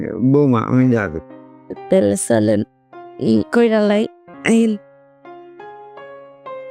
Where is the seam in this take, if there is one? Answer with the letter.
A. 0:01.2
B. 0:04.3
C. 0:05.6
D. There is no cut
B